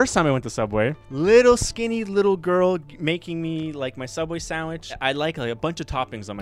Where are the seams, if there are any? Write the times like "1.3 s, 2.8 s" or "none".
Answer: 1.0 s, 4.9 s